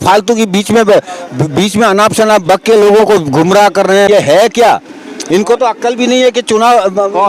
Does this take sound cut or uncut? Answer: cut